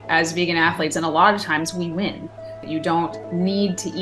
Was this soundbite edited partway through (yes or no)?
yes